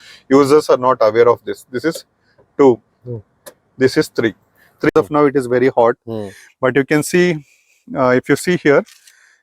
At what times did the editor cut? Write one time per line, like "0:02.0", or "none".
0:04.9